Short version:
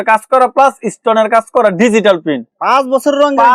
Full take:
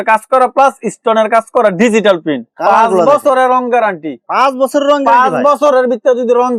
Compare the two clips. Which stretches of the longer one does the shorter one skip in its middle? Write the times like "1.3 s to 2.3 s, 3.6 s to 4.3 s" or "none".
2.4 s to 4.1 s